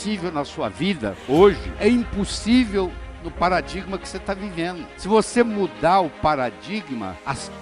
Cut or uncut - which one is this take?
uncut